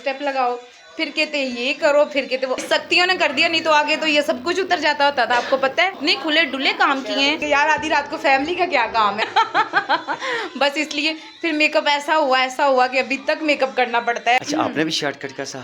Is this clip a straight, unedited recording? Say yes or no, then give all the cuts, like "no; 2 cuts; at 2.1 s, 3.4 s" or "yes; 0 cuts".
no; 5 cuts; at 2.6 s, 6.0 s, 7.4 s, 9.2 s, 14.4 s